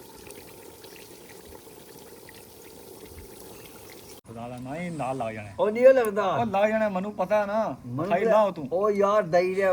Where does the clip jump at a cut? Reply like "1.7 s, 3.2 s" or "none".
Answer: 4.4 s